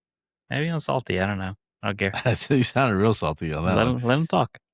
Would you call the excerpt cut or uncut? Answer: uncut